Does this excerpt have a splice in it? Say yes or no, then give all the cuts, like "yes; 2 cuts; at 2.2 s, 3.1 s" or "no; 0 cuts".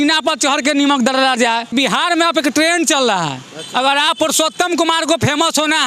yes; 1 cut; at 1.7 s